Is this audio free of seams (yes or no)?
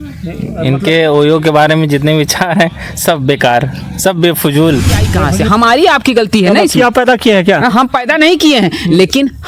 no